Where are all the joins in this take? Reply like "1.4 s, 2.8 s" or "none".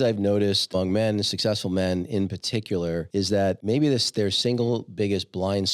0.7 s, 3.4 s